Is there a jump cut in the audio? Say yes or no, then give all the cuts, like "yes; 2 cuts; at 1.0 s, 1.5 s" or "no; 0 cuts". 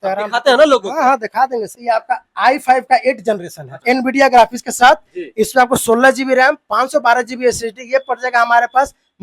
yes; 1 cut; at 1.7 s